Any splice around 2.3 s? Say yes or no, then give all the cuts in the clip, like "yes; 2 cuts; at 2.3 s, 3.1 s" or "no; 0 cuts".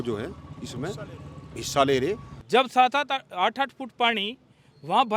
yes; 1 cut; at 2.3 s